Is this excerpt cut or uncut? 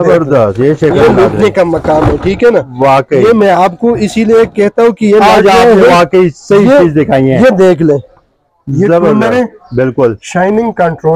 uncut